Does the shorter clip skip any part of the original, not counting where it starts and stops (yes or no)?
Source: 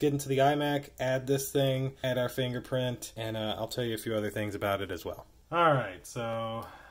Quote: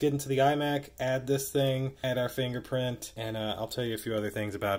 no